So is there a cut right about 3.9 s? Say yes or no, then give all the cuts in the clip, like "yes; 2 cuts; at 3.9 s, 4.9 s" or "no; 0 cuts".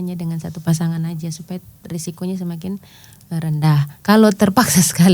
yes; 1 cut; at 3.9 s